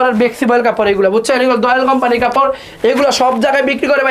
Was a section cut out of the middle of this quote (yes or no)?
no